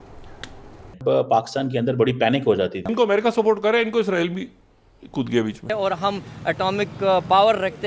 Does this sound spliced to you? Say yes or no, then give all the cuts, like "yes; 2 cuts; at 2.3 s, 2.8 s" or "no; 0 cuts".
yes; 3 cuts; at 0.9 s, 2.8 s, 5.7 s